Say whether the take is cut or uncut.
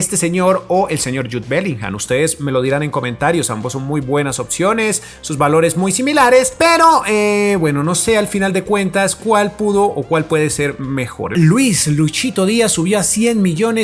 cut